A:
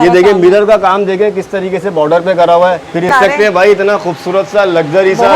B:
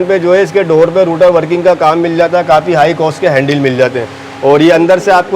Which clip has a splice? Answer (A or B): A